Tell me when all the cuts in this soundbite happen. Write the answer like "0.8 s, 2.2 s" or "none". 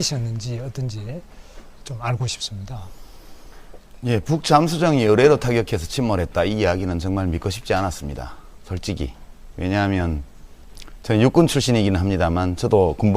4.1 s